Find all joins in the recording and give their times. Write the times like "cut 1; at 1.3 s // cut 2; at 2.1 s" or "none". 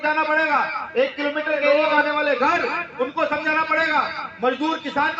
cut 1; at 1.7 s